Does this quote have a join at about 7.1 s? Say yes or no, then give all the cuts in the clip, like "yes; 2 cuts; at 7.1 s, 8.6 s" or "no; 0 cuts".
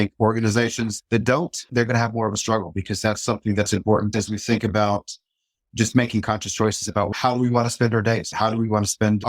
yes; 3 cuts; at 4.1 s, 7.1 s, 8.3 s